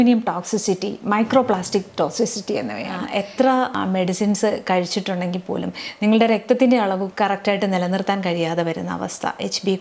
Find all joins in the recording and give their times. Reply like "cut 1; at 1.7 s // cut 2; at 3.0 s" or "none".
cut 1; at 3.0 s